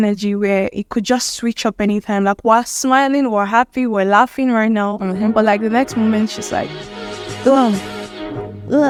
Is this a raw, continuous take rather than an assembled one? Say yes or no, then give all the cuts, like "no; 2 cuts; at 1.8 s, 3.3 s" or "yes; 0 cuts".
yes; 0 cuts